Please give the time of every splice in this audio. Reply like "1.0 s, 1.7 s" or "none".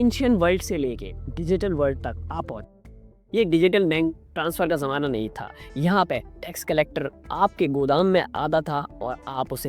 2.9 s